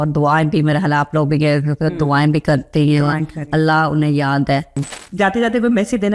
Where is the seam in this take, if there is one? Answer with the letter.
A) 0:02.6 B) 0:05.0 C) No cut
B